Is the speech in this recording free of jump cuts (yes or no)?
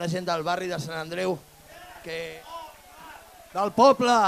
no